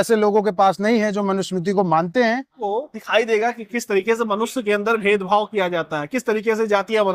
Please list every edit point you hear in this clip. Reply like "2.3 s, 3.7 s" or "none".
2.6 s